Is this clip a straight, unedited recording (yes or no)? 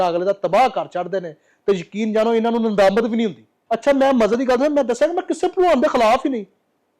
yes